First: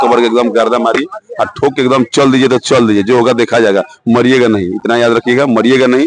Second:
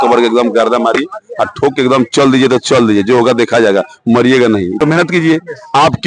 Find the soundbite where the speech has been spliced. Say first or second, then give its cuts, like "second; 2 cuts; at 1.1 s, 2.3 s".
second; 1 cut; at 4.8 s